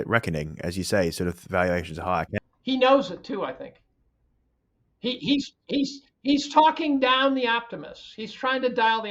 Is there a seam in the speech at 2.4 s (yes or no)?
yes